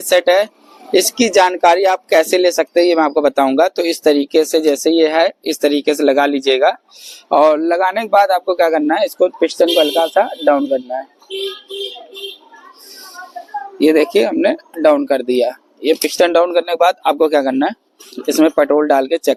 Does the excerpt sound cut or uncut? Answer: uncut